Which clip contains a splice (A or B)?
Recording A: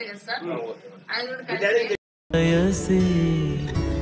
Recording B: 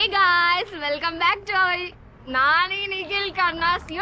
A